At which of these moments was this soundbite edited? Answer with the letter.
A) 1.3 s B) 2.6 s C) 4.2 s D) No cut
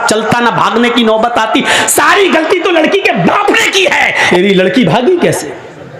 C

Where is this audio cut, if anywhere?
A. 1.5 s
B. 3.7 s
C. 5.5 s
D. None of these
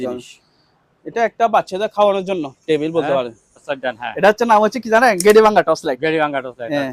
B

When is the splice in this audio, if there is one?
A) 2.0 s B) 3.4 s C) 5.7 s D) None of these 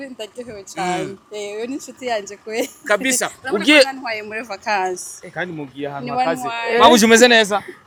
D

